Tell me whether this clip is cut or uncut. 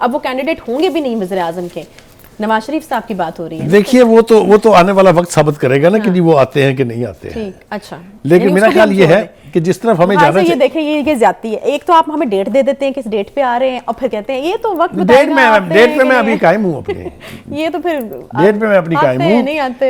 uncut